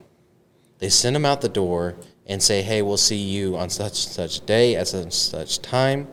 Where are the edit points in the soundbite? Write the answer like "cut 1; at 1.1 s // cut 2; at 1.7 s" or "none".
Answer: none